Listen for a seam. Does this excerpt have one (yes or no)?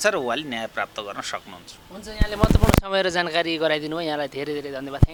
no